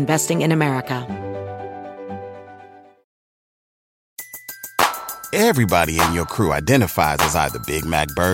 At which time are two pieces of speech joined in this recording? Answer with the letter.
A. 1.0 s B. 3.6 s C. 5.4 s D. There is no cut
A